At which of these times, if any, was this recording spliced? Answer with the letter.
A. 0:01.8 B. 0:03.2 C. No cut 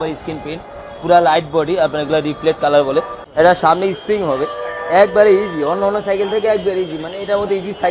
B